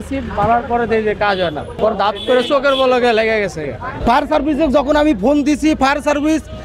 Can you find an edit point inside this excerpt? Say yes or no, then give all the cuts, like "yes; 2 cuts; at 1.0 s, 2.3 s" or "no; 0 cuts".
yes; 2 cuts; at 1.7 s, 3.9 s